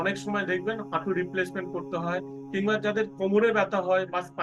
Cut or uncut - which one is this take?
uncut